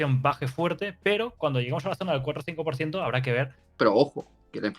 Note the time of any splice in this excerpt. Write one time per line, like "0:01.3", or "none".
0:03.8